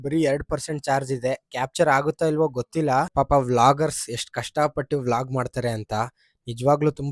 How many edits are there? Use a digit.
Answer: 1